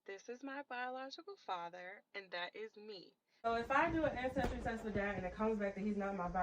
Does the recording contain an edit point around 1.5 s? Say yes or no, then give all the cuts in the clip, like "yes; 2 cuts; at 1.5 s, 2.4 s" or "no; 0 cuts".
no; 1 cut; at 3.5 s